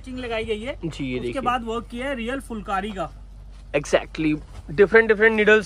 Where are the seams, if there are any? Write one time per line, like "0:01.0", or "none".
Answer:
none